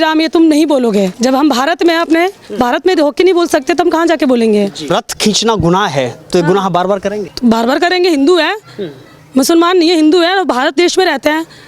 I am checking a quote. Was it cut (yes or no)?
yes